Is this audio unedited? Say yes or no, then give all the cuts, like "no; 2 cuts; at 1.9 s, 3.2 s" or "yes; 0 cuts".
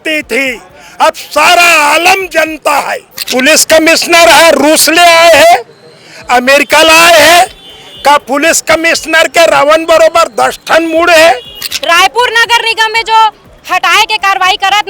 no; 2 cuts; at 3.3 s, 11.7 s